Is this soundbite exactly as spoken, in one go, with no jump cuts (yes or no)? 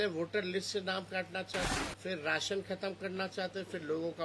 no